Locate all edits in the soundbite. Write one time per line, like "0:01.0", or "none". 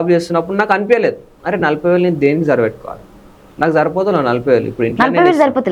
none